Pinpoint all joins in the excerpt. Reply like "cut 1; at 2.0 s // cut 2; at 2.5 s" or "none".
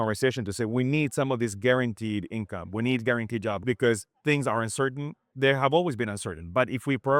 cut 1; at 3.6 s // cut 2; at 5.3 s